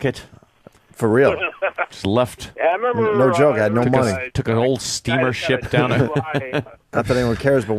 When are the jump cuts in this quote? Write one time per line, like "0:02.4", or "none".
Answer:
0:06.8